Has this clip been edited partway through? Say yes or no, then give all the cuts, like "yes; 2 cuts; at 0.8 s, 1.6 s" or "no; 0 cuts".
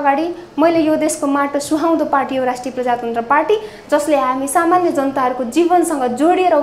no; 0 cuts